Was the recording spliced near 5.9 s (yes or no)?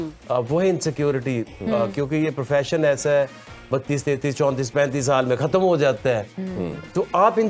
no